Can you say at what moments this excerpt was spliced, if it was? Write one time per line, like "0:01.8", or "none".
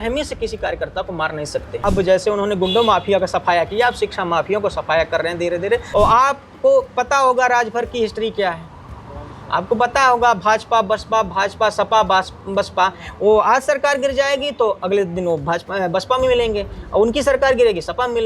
0:01.7
0:05.9